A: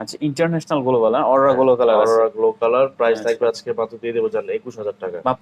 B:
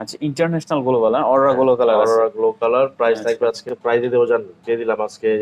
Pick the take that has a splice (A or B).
B